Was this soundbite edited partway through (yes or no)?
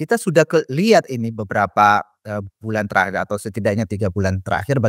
no